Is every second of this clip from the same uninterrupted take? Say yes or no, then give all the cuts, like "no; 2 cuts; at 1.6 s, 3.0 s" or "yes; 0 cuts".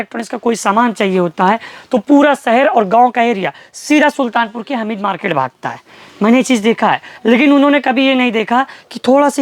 yes; 0 cuts